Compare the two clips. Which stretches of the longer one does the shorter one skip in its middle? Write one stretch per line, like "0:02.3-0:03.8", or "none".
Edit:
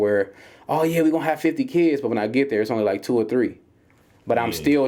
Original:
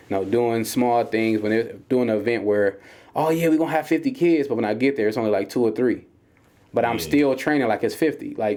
none

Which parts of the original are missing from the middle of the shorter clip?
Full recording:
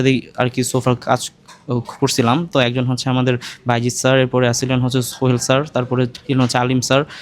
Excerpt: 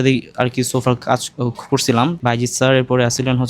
0:01.3-0:01.6
0:02.5-0:03.6

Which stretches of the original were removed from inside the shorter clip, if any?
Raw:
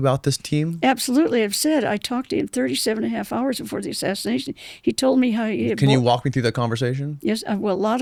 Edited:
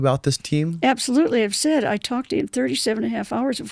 none

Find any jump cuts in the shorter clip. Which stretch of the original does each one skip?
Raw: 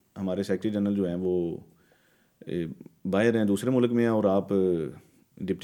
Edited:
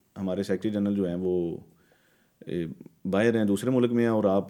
none

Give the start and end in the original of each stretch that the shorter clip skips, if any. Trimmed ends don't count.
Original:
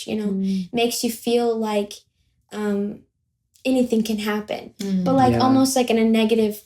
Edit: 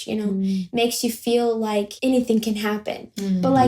0:01.9-0:03.6

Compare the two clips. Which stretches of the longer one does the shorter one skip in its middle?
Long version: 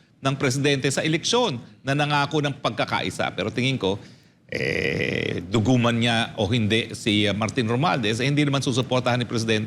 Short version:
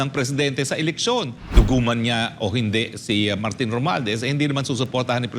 0:01.7-0:05.4

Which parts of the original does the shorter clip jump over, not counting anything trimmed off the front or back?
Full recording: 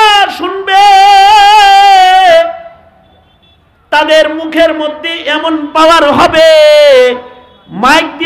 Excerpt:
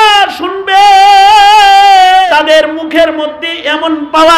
0:02.3-0:03.9

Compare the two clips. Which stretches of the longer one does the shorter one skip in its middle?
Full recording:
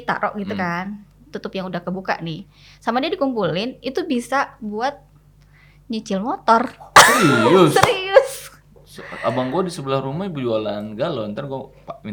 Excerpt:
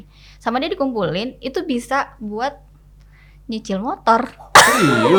none

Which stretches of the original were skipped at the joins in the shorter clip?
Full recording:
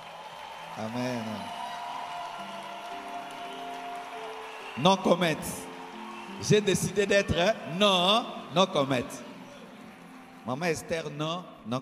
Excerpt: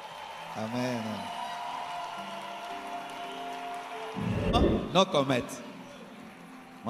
0:04.8-0:08.2

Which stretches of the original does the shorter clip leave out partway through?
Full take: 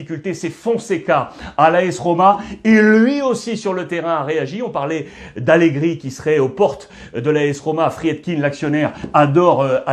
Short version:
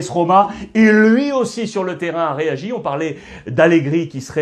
none

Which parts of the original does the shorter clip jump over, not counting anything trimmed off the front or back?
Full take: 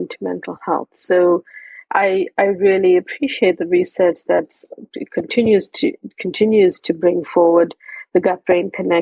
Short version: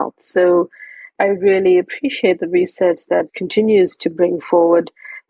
0:01.8-0:02.3
0:04.6-0:06.2

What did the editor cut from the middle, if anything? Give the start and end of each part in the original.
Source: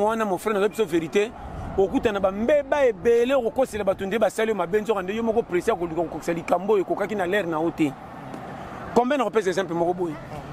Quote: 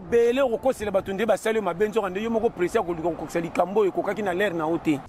none

